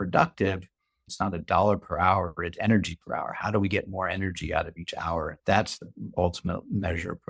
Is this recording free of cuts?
no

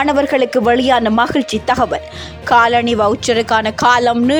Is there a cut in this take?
no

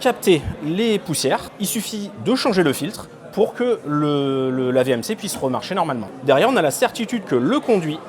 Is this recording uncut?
no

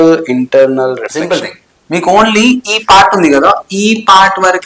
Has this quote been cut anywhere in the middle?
yes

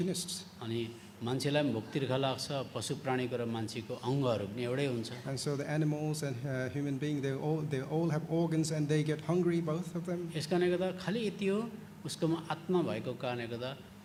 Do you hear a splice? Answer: no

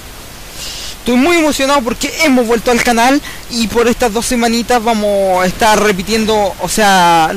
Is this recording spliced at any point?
yes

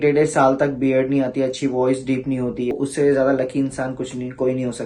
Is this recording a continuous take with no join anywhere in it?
no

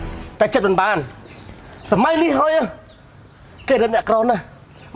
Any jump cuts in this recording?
no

